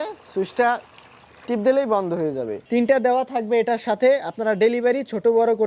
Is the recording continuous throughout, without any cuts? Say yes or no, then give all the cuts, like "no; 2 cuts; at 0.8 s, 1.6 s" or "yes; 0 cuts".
no; 1 cut; at 2.6 s